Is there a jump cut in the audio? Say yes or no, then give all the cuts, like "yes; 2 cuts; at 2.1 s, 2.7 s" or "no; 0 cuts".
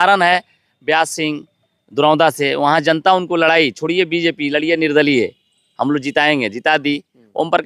no; 0 cuts